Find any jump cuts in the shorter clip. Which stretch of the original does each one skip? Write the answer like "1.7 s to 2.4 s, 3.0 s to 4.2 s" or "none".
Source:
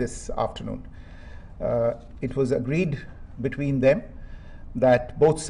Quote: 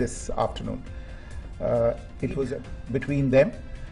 2.6 s to 3.1 s

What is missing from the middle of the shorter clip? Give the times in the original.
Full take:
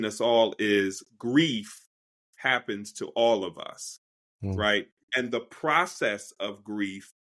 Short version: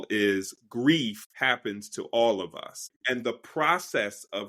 1.8 s to 2.3 s, 3.9 s to 5.0 s

